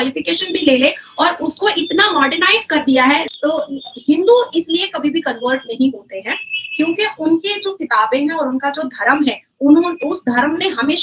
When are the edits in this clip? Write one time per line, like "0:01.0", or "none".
0:03.3